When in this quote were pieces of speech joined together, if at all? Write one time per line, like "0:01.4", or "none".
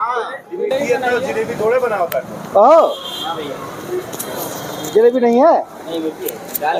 none